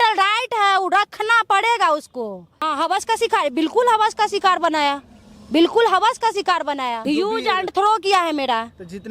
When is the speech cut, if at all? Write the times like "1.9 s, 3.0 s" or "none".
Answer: 2.7 s, 7.1 s

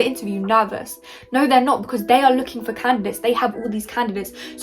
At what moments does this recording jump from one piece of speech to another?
none

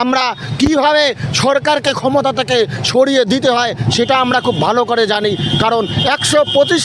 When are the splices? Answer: none

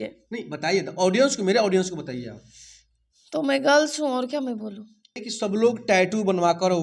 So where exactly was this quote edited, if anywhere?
5.3 s

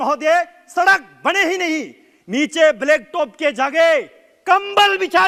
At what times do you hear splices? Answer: none

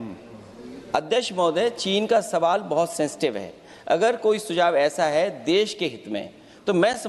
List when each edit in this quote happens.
none

